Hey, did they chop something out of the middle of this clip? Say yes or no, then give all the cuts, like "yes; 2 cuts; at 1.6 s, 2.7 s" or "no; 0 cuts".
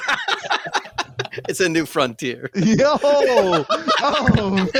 no; 0 cuts